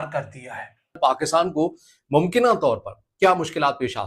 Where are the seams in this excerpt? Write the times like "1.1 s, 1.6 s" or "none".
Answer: 1.2 s